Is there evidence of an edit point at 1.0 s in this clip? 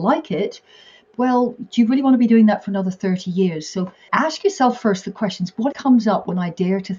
yes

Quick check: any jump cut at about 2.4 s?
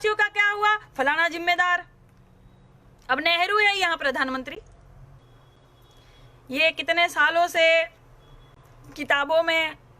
no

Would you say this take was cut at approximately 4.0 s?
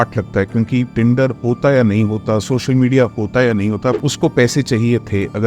yes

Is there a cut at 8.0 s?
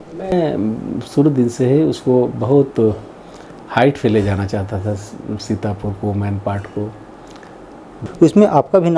yes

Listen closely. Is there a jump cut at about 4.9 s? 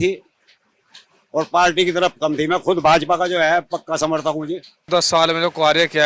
yes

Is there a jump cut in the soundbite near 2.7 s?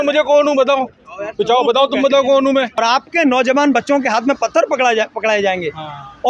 yes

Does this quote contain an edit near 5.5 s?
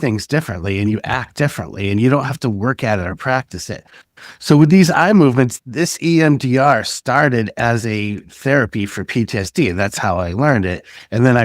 yes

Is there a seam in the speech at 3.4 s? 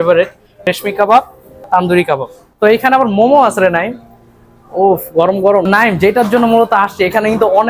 no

